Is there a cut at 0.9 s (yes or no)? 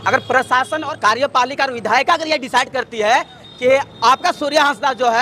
yes